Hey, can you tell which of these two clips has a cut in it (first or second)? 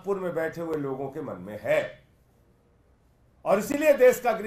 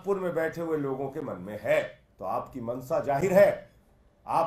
second